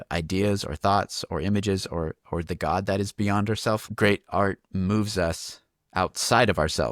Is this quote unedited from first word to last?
yes; 0 cuts

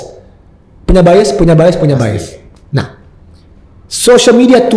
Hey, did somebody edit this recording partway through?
no; 0 cuts

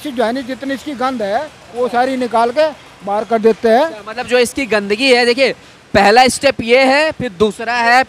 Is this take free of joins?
yes; 0 cuts

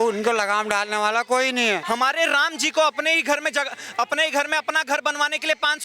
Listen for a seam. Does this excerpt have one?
yes; 1 cut; at 1.8 s

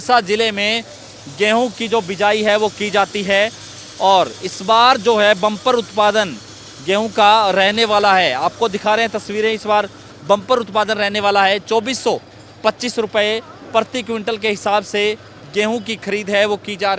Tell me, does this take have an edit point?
no; 0 cuts

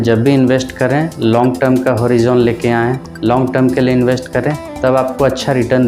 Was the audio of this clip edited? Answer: no; 0 cuts

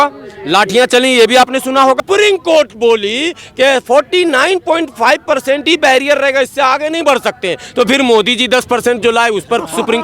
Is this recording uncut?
no; 1 cut; at 2.0 s

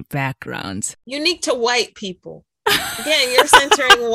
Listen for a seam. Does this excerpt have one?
no; 0 cuts

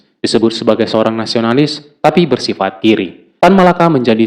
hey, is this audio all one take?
no; 1 cut; at 3.2 s

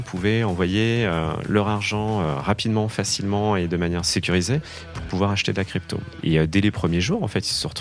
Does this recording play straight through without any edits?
no; 2 cuts; at 4.1 s, 6.0 s

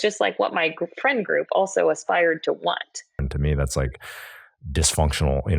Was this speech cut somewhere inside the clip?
yes; 1 cut; at 3.3 s

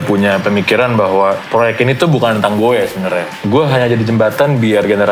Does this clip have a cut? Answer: no; 0 cuts

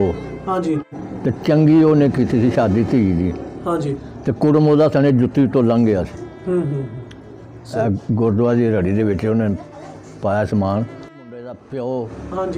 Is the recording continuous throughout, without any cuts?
no; 2 cuts; at 1.0 s, 11.1 s

